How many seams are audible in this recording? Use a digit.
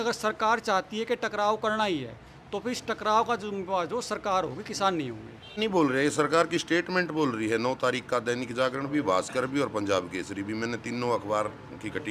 1